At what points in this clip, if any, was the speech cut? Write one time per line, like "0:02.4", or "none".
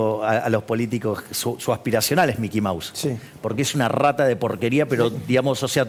none